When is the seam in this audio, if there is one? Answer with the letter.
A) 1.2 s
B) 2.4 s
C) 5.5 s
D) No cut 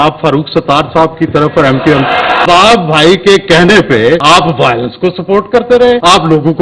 B